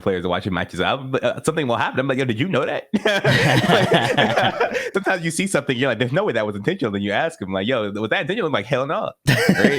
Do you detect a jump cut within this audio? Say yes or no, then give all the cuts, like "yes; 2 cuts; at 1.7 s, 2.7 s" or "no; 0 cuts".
yes; 1 cut; at 4.9 s